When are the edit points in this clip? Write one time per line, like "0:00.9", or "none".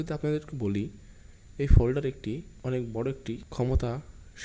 0:02.5
0:03.5